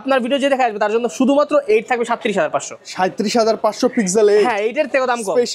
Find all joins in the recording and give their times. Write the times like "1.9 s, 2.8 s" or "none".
none